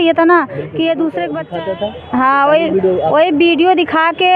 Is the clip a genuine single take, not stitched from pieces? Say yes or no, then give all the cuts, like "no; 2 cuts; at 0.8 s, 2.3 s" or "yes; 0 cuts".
no; 1 cut; at 1.4 s